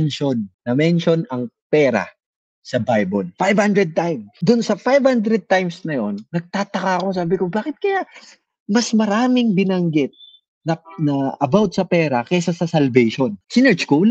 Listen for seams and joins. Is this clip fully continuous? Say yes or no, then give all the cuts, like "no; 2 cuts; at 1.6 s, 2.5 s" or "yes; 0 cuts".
yes; 0 cuts